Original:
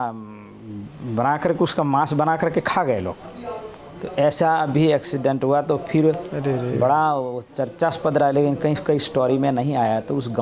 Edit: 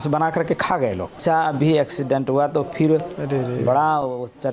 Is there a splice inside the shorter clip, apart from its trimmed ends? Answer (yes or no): yes